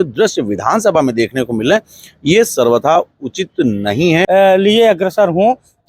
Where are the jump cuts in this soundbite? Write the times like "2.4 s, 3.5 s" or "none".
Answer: 4.2 s